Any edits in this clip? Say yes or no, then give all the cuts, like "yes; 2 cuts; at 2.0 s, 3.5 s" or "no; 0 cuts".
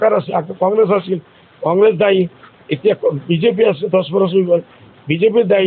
no; 0 cuts